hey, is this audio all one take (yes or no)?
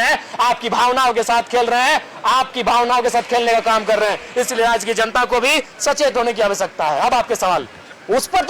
yes